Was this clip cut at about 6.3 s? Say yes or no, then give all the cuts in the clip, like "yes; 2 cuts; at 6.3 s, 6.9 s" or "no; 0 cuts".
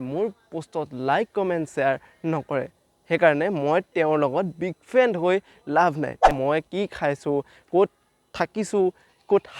yes; 1 cut; at 6.3 s